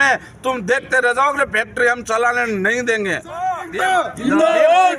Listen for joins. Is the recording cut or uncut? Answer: cut